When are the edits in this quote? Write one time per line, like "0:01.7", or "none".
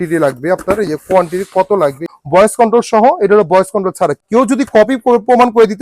0:02.1
0:04.2